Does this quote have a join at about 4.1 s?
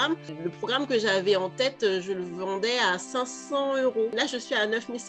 yes; 1 cut; at 4.1 s

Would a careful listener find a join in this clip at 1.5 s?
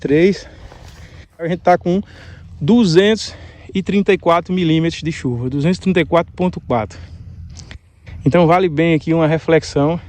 yes; 1 cut; at 1.5 s

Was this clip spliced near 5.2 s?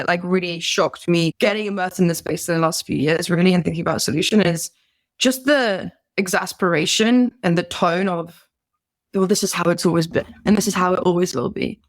no; 2 cuts; at 1.3 s, 10.4 s

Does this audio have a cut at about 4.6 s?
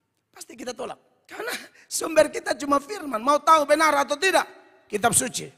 no; 1 cut; at 1.2 s

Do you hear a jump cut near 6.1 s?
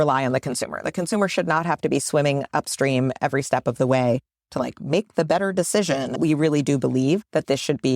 yes; 1 cut; at 6.1 s

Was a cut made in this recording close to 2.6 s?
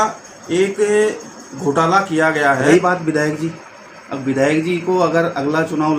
yes; 1 cut; at 2.6 s

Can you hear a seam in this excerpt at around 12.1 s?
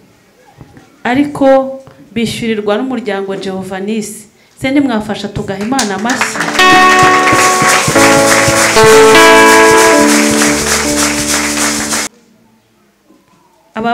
yes; 1 cut; at 12.1 s

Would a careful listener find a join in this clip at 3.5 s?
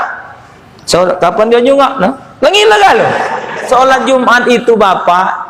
yes; 1 cut; at 3.5 s

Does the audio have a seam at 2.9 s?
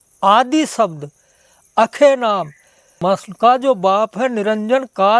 yes; 1 cut; at 2.9 s

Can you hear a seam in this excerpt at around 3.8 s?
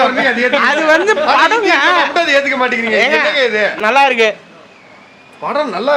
yes; 1 cut; at 3.8 s

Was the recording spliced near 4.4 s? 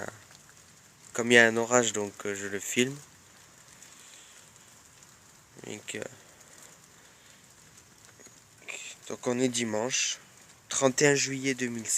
yes; 1 cut; at 4.4 s

